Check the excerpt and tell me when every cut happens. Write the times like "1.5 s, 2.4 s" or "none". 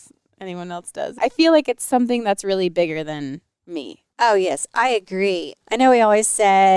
1.2 s, 5.5 s